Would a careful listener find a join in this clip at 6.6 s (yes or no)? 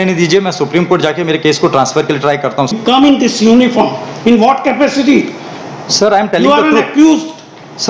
no